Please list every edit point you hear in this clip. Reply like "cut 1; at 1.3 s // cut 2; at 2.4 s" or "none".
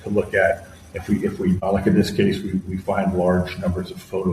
cut 1; at 1.6 s